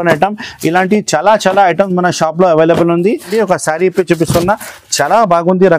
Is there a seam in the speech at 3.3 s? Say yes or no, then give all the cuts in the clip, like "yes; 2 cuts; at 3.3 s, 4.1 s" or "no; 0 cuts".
yes; 1 cut; at 3.3 s